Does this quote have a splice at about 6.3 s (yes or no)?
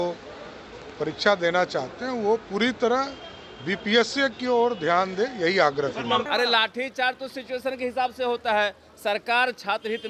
yes